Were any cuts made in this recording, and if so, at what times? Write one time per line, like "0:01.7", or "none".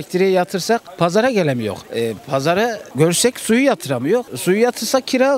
none

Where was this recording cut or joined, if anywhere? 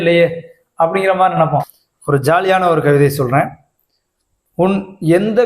0:01.8

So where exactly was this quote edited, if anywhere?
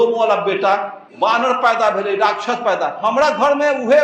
0:01.0
0:03.0

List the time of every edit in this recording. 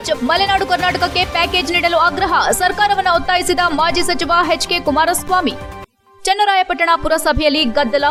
none

